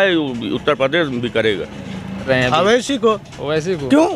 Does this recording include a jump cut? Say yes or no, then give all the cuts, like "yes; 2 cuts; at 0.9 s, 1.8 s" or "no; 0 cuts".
yes; 1 cut; at 2.3 s